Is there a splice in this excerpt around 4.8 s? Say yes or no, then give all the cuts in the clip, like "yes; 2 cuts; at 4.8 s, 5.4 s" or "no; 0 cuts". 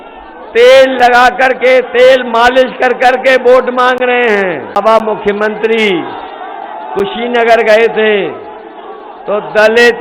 yes; 1 cut; at 4.8 s